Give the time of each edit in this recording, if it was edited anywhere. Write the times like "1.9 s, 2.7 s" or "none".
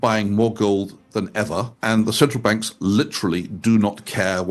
1.7 s